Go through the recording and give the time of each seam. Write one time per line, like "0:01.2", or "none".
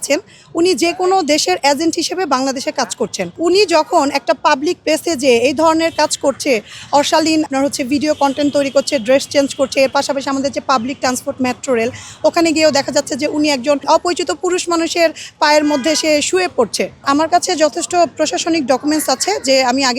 0:03.3
0:07.5
0:13.8
0:17.0